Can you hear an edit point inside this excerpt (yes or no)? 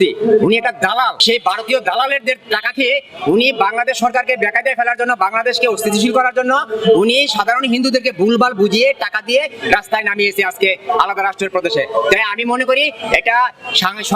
yes